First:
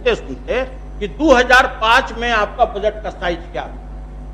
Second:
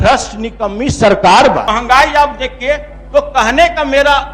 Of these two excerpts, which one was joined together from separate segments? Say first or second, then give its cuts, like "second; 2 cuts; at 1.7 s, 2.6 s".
second; 1 cut; at 1.6 s